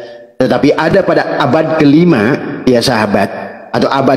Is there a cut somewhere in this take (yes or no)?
no